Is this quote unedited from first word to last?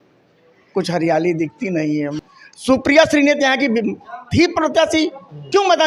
no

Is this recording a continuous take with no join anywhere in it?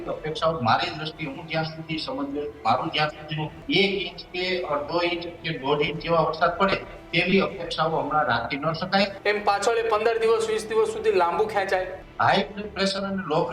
no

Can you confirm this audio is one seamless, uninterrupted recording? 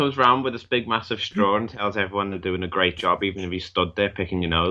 yes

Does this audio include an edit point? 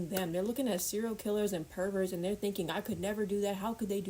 no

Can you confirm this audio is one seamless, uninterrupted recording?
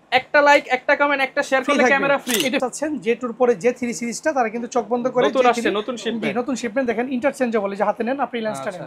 no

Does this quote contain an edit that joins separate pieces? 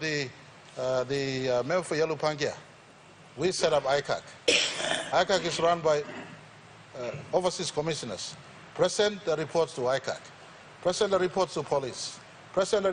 no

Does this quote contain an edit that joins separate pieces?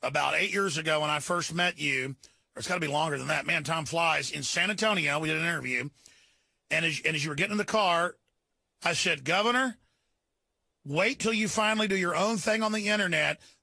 yes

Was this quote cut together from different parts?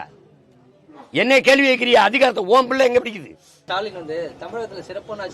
yes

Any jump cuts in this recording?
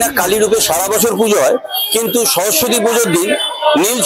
no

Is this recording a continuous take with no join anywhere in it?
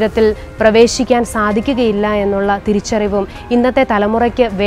yes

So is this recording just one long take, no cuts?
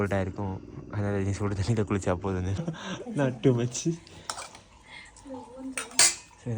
no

